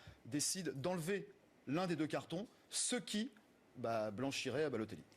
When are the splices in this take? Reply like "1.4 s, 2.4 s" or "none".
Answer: 1.3 s